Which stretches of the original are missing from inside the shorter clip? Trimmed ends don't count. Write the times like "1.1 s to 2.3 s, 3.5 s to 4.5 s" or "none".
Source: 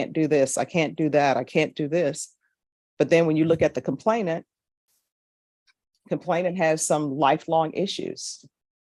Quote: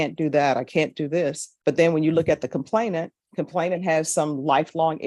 2.3 s to 2.8 s, 4.5 s to 5.9 s